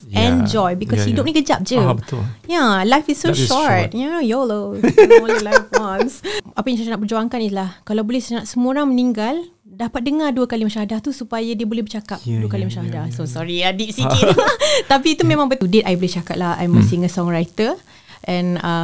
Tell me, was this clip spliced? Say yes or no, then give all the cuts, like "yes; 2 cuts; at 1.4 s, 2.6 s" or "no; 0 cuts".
yes; 2 cuts; at 6.4 s, 15.6 s